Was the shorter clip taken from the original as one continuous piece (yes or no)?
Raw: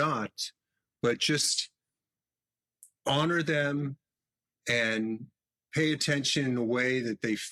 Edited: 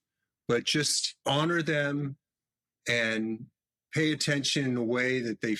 no